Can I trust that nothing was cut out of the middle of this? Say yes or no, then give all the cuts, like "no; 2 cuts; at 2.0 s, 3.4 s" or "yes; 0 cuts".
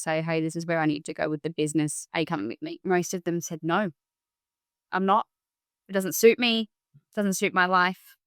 no; 1 cut; at 2.5 s